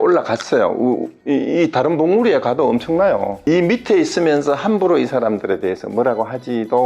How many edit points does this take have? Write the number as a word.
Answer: one